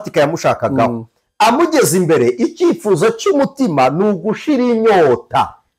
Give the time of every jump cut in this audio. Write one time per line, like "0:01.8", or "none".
none